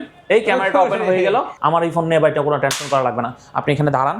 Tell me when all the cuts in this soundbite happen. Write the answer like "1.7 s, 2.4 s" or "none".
1.6 s